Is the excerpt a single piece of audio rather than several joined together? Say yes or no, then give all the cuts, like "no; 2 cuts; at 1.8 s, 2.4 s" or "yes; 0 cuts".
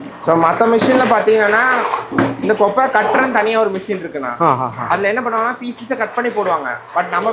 yes; 0 cuts